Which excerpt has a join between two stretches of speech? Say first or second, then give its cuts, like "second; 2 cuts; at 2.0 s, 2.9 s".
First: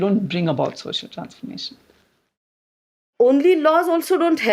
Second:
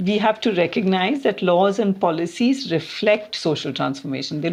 first; 1 cut; at 3.1 s